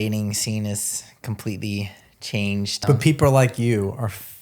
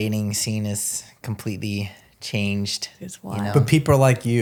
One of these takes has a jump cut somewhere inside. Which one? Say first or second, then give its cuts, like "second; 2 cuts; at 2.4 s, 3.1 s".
first; 1 cut; at 2.8 s